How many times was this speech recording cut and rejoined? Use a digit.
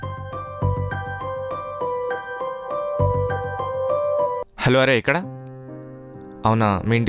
1